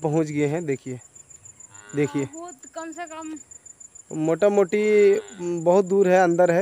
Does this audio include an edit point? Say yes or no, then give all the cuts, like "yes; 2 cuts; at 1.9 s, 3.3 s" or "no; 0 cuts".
no; 0 cuts